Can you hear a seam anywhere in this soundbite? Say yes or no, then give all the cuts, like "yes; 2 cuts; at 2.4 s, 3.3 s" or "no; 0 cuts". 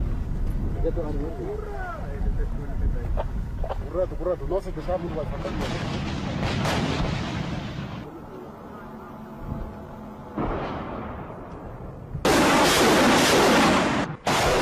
no; 0 cuts